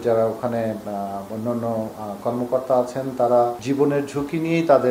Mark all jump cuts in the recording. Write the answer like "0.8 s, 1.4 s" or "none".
none

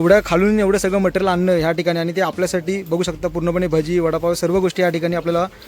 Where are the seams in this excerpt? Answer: none

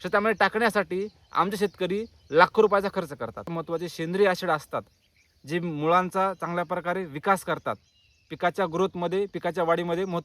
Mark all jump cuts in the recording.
3.5 s

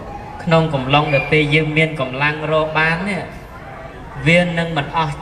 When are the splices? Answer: none

